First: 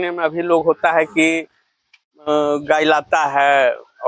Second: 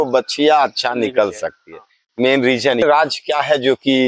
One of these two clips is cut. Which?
second; 1 cut; at 2.8 s

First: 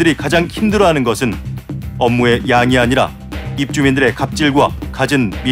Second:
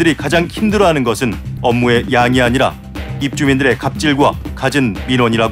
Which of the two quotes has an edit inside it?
second; 1 cut; at 1.5 s

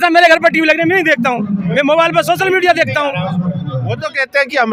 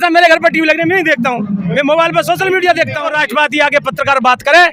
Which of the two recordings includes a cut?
second; 1 cut; at 3.1 s

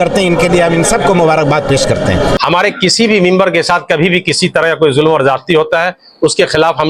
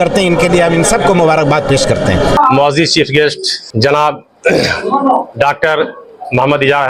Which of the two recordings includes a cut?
first; 1 cut; at 2.4 s

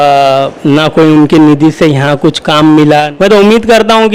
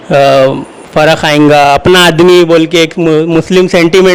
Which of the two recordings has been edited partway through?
first; 1 cut; at 3.1 s

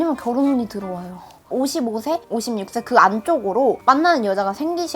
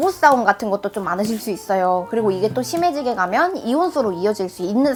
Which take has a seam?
first; 1 cut; at 1.5 s

